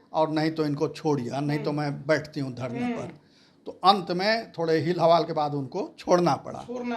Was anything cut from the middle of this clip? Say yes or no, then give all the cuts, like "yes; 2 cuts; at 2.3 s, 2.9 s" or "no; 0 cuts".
no; 0 cuts